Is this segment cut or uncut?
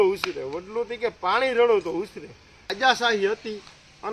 cut